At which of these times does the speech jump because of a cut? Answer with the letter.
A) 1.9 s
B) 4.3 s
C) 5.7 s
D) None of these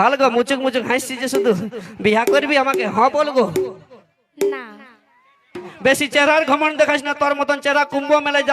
C